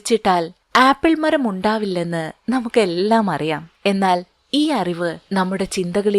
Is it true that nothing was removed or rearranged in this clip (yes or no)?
no